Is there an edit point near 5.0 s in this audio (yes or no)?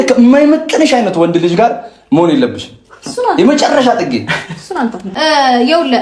yes